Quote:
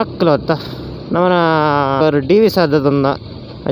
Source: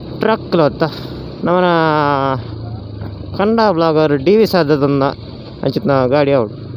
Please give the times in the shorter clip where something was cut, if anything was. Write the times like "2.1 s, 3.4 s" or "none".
2.0 s